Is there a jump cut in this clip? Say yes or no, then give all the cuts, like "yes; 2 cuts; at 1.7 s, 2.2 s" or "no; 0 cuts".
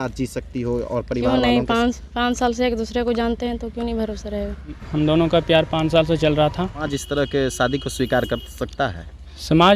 yes; 2 cuts; at 4.8 s, 7.0 s